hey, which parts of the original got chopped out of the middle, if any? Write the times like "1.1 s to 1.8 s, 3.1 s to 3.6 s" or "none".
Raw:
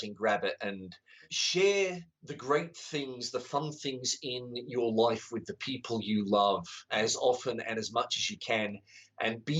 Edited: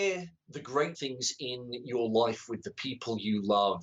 2.7 s to 3.8 s